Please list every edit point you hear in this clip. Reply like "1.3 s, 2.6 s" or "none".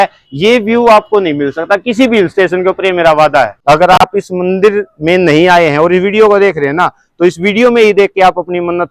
3.5 s